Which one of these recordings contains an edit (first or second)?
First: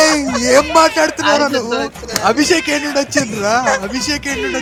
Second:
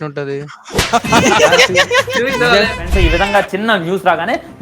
second